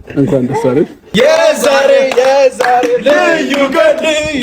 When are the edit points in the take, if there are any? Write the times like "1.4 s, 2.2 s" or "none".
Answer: 1.0 s